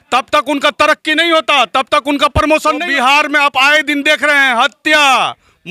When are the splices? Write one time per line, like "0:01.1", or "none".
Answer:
0:02.8